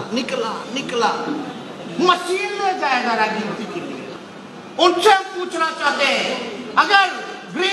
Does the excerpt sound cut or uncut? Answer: cut